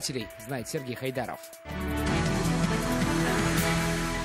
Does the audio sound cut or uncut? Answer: cut